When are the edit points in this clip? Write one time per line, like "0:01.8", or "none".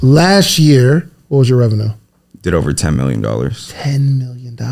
0:01.2